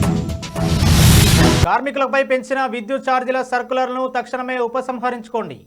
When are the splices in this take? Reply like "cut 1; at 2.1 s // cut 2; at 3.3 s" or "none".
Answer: cut 1; at 1.6 s